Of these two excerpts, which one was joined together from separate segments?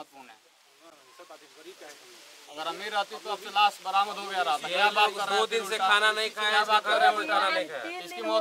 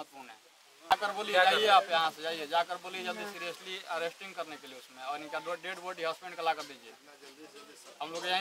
second; 1 cut; at 0.9 s

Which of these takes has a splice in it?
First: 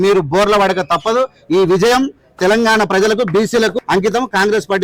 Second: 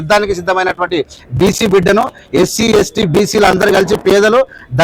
first; 1 cut; at 3.8 s

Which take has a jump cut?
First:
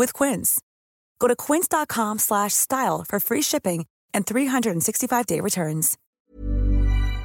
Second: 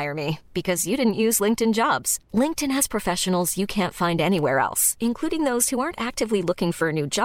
first; 1 cut; at 6.2 s

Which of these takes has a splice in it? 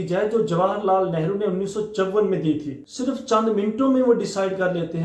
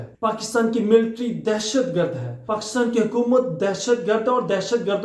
first; 1 cut; at 2.7 s

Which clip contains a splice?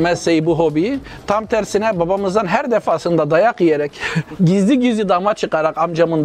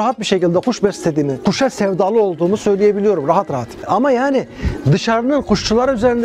second; 2 cuts; at 1.4 s, 3.8 s

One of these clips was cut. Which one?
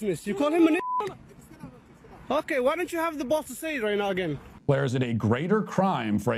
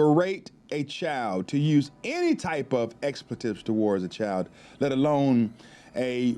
first; 1 cut; at 4.5 s

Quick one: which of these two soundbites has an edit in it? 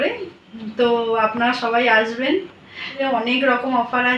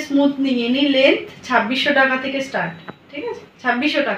first; 1 cut; at 3.0 s

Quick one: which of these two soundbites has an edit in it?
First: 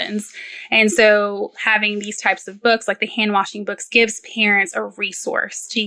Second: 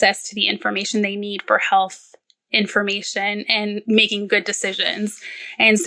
second; 1 cut; at 3.8 s

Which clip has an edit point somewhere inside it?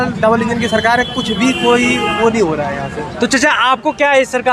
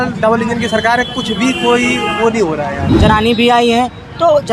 second; 1 cut; at 2.8 s

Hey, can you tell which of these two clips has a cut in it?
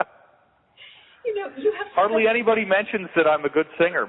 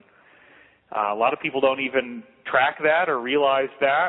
second; 1 cut; at 1.2 s

